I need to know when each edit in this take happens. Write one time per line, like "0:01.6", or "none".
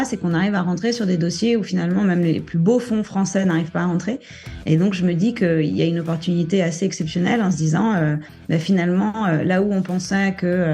0:02.3